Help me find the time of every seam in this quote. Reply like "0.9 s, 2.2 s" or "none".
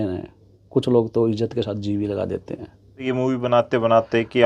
3.0 s

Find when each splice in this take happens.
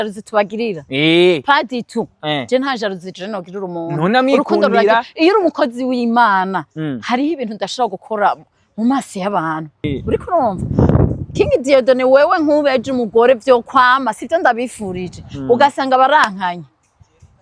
9.8 s

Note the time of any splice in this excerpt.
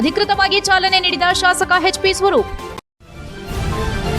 2.8 s

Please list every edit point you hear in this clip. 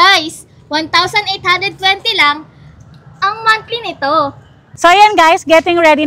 none

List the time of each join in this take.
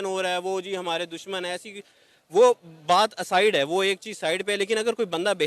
none

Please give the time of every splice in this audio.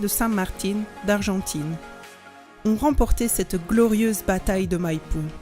2.0 s

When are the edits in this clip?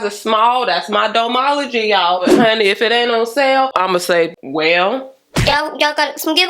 2.2 s, 5.5 s

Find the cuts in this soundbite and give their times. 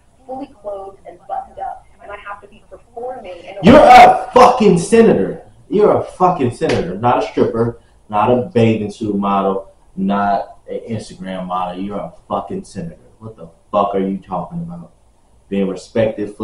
none

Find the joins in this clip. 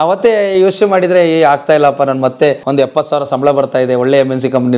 2.6 s

